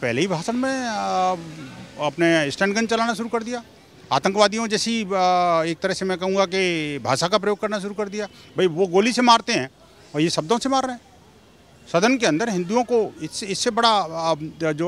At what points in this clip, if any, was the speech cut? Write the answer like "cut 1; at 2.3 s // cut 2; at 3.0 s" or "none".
none